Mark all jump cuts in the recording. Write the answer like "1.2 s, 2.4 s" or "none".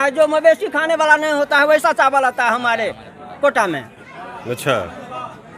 none